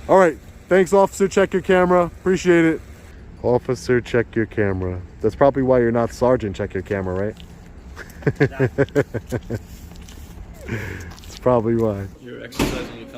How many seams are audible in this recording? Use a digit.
2